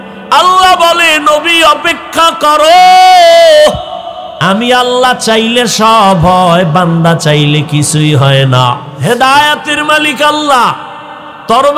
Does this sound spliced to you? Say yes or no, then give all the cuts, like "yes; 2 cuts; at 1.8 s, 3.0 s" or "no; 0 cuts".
yes; 1 cut; at 8.9 s